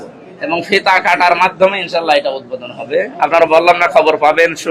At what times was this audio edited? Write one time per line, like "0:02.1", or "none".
none